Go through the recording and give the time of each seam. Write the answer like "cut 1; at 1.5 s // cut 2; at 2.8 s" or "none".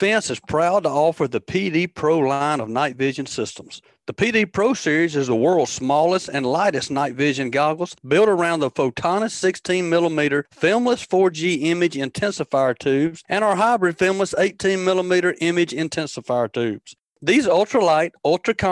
none